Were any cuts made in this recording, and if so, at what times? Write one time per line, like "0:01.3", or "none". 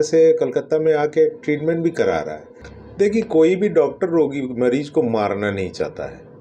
0:02.8